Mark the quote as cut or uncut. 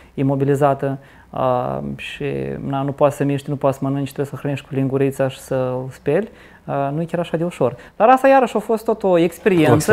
uncut